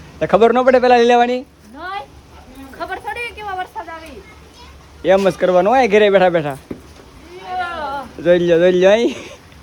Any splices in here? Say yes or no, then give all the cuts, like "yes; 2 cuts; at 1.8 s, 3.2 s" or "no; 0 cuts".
no; 0 cuts